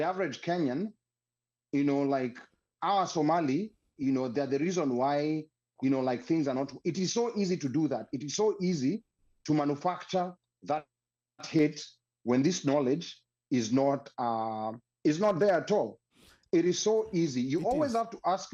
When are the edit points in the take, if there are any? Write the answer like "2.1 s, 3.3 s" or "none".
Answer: none

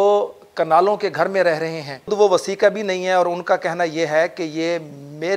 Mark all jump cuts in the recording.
2.1 s

